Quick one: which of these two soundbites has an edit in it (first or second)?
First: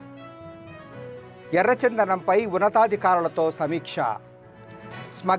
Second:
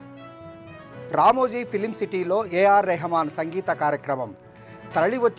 second